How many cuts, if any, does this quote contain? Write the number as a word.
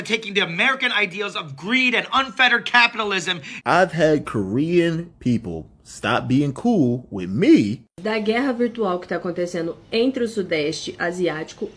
two